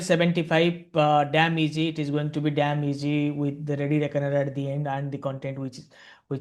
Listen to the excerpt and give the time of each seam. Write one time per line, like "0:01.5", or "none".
none